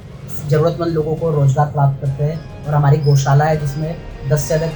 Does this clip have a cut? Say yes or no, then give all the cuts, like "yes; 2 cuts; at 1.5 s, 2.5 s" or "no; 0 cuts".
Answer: no; 0 cuts